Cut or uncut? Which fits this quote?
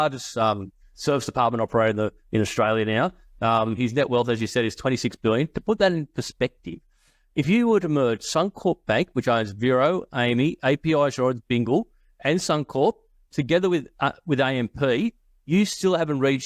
uncut